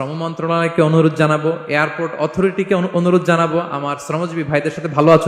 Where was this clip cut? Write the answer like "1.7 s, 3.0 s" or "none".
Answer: none